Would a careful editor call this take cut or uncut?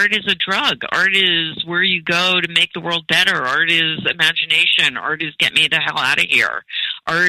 uncut